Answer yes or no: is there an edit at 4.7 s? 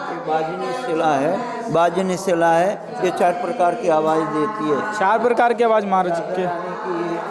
no